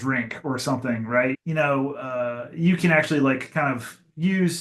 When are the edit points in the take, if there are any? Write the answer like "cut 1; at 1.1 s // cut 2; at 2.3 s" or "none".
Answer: cut 1; at 1.4 s